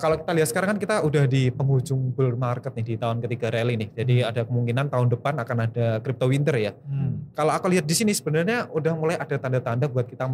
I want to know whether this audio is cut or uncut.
uncut